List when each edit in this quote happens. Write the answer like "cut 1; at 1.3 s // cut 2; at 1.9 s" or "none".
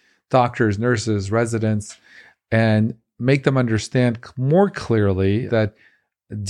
cut 1; at 5.5 s